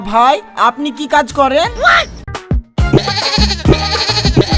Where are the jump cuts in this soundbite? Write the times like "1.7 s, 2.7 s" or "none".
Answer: 2.2 s